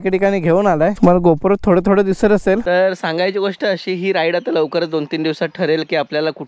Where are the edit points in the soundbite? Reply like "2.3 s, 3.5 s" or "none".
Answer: 0.9 s, 2.6 s